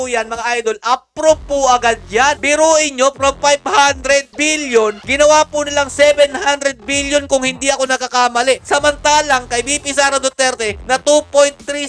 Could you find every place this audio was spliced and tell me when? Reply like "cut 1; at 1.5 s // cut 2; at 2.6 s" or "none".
cut 1; at 2.4 s